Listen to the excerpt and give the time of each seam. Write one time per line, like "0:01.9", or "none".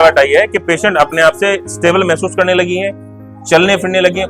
none